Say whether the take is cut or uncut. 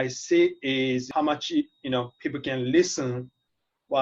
uncut